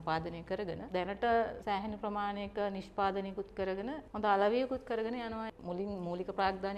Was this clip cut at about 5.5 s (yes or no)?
yes